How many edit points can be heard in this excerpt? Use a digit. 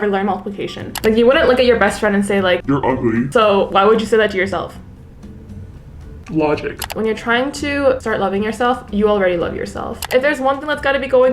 3